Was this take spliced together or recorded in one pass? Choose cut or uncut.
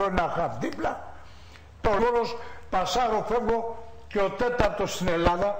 uncut